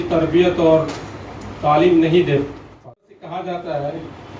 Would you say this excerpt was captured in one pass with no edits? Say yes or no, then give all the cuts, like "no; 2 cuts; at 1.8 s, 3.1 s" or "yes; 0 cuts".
no; 1 cut; at 2.6 s